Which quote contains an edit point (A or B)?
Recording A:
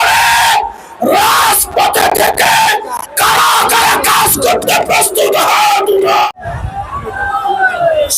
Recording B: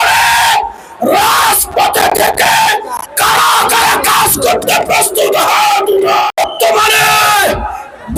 A